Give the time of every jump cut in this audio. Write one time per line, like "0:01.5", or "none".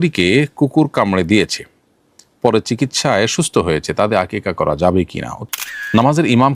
0:05.3